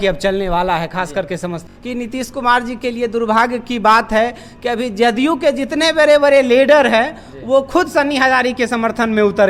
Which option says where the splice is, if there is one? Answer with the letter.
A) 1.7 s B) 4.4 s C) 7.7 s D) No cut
A